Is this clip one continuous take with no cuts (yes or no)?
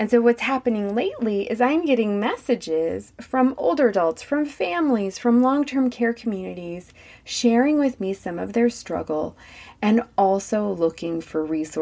yes